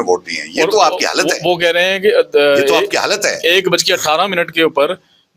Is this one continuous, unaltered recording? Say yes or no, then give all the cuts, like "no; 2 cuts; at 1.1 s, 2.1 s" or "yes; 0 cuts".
yes; 0 cuts